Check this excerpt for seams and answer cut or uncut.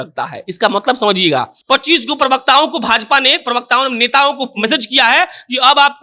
cut